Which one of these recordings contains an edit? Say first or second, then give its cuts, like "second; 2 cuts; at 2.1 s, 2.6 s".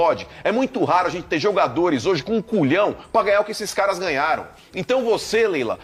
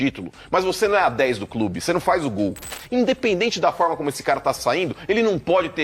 second; 1 cut; at 2.7 s